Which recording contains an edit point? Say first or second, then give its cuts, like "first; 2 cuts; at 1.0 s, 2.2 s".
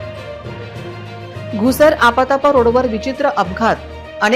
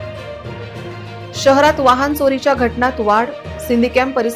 first; 1 cut; at 1.3 s